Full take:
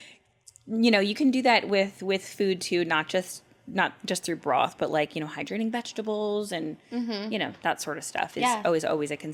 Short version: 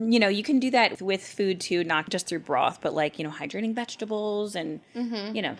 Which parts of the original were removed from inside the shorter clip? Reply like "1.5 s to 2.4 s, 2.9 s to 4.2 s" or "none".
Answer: 1.7 s to 1.9 s, 3.1 s to 4.0 s

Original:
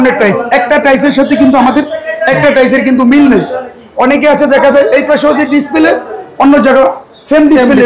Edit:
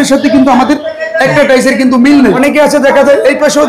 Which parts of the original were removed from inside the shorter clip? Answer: 3.4 s to 4.0 s

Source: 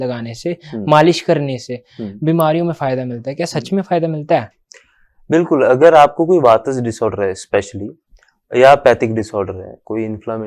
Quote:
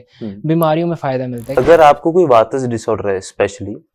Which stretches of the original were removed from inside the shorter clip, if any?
3.3 s to 5.7 s

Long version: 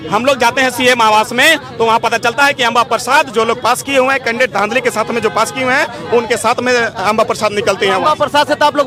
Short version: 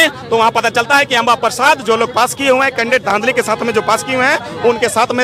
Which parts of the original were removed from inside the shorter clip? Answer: none

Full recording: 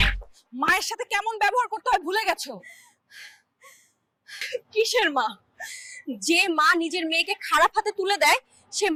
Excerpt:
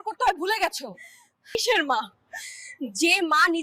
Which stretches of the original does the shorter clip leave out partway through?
3.2 s to 4.8 s

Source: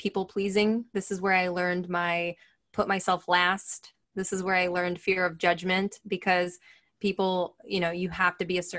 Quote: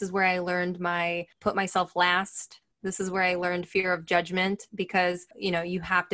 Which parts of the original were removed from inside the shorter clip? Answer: 2.4 s to 2.6 s, 6.6 s to 7.6 s

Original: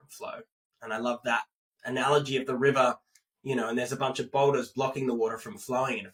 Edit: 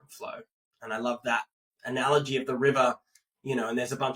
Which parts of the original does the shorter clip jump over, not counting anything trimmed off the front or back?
none

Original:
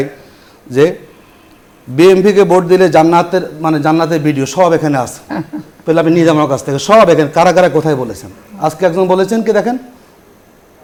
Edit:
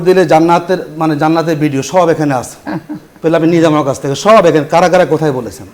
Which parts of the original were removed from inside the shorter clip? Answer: none

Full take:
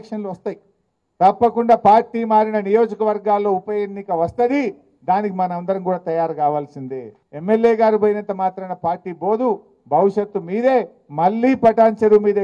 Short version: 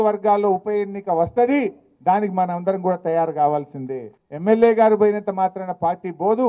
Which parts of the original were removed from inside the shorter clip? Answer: none

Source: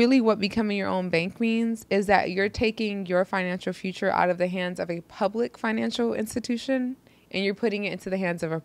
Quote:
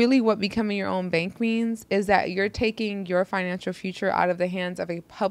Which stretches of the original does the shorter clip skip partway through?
none

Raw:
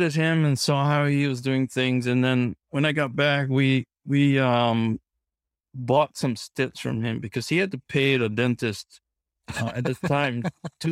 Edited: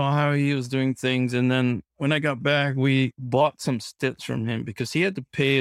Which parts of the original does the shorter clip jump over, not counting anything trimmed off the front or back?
3.9 s to 5.7 s

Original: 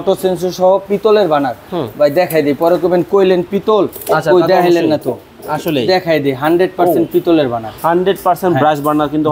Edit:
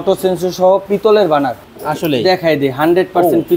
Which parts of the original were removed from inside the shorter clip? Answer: 1.7 s to 5.3 s

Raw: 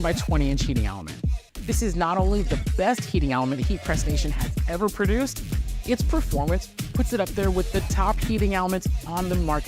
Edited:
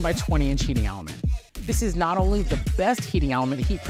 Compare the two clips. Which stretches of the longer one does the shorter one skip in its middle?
none

